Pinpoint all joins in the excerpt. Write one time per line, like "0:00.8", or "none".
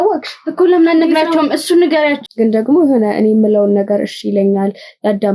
0:02.2